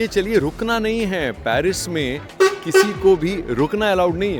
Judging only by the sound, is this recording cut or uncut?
uncut